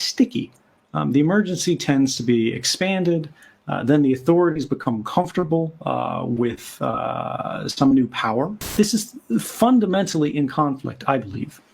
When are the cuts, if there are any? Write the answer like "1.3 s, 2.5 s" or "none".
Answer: 8.7 s